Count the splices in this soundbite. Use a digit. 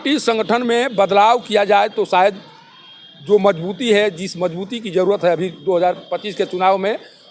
0